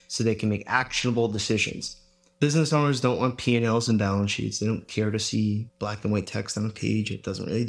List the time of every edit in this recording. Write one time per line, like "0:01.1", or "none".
0:05.7